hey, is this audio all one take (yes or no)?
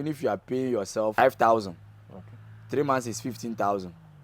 no